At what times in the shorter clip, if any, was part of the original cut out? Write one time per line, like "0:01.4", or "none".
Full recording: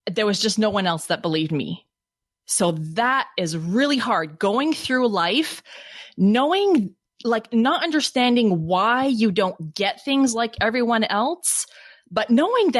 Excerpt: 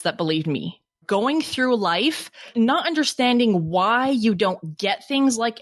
0:01.0
0:02.5